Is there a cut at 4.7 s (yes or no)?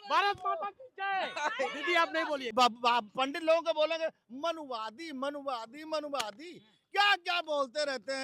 no